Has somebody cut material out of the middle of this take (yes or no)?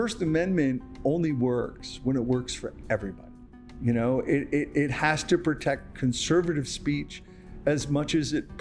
no